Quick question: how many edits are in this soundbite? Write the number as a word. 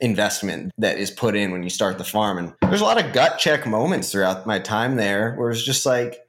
one